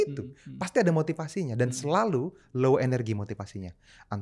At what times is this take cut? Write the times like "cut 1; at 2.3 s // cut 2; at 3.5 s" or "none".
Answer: none